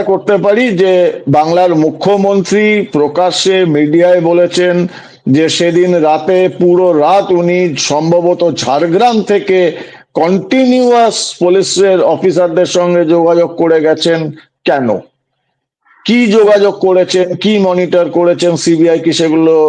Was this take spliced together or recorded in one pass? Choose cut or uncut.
uncut